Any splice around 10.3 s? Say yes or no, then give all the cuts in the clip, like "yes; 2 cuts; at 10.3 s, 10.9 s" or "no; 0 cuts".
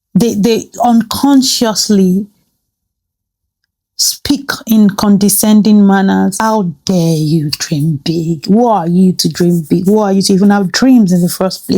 no; 1 cut; at 6.3 s